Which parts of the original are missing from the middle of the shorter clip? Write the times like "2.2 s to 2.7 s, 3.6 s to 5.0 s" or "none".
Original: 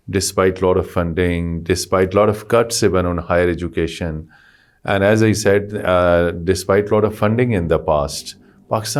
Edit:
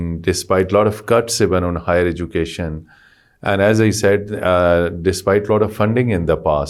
none